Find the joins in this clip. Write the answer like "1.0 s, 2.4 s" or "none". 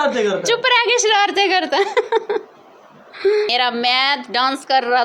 3.5 s